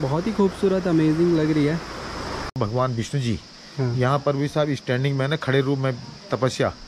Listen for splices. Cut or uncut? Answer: cut